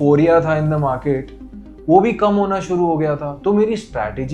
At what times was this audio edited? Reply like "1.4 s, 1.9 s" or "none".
none